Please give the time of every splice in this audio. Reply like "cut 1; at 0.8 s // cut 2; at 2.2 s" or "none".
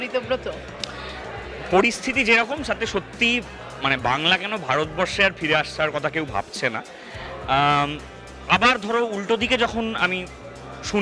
none